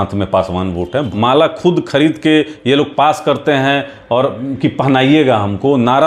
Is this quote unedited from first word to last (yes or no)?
no